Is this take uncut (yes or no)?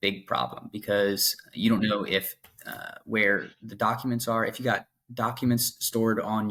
yes